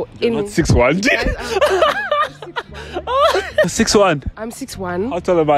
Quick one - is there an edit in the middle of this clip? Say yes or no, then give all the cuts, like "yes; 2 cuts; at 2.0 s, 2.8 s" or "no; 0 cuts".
yes; 1 cut; at 3.7 s